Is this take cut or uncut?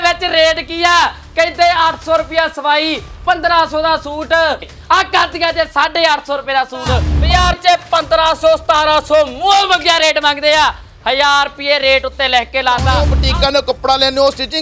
cut